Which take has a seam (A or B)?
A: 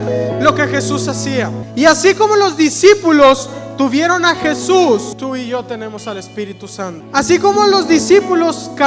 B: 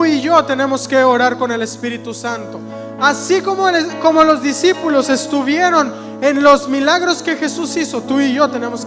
A